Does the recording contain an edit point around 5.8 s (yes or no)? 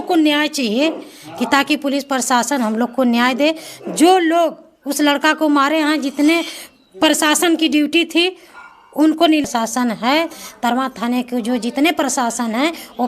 no